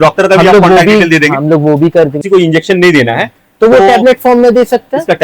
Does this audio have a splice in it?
yes; 1 cut; at 2.2 s

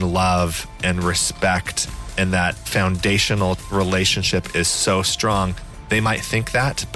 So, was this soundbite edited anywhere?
yes; 3 cuts; at 2.5 s, 3.6 s, 5.7 s

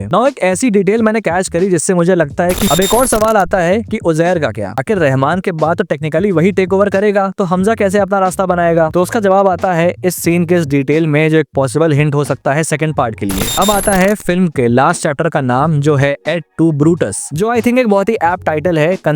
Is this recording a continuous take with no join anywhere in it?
no; 2 cuts; at 2.7 s, 13.5 s

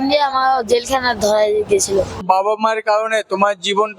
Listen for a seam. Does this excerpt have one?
yes; 1 cut; at 2.2 s

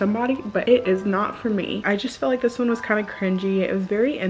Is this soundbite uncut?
no; 1 cut; at 1.8 s

